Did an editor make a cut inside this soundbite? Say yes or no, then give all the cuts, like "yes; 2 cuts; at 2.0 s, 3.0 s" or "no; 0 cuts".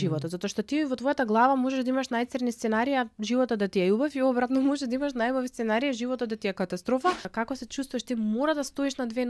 yes; 1 cut; at 7.3 s